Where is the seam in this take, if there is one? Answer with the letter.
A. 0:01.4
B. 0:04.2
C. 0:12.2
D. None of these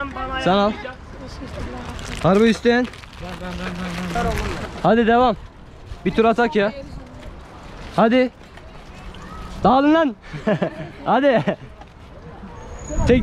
B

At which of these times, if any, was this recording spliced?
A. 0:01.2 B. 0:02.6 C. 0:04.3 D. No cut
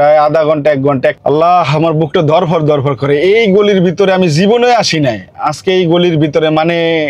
A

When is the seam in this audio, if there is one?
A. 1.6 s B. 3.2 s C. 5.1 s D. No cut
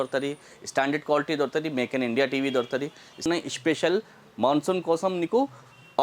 B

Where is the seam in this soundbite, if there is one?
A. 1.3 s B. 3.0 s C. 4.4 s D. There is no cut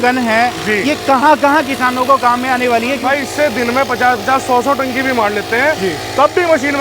B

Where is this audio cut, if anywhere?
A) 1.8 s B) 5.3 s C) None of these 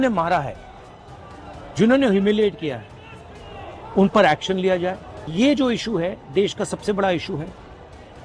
B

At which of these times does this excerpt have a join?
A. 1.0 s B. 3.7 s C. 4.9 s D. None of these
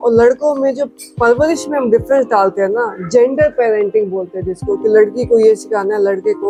D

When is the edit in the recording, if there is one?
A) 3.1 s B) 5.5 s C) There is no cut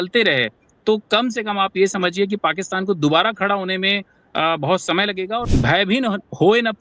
B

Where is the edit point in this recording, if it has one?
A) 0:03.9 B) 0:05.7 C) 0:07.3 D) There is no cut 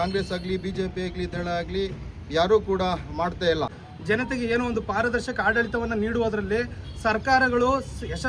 A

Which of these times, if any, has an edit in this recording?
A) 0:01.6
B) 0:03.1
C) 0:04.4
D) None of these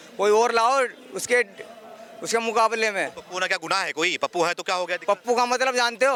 D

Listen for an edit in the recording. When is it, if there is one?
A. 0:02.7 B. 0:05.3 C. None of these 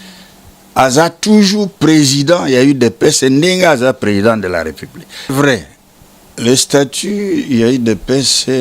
B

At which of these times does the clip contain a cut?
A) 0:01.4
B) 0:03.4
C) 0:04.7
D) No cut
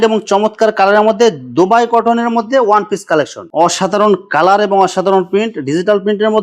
B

